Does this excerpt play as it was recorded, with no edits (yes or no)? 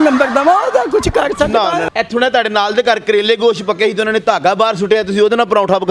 no